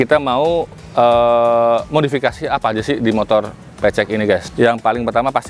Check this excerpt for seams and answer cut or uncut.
uncut